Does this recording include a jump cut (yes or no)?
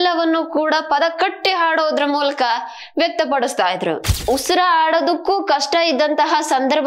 yes